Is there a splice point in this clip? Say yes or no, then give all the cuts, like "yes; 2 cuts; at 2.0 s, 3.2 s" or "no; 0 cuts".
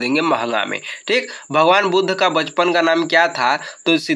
no; 0 cuts